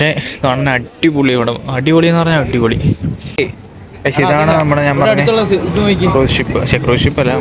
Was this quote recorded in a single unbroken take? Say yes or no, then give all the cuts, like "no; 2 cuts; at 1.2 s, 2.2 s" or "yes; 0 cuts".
no; 1 cut; at 3.4 s